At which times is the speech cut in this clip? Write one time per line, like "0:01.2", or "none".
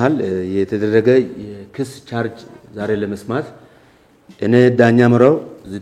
none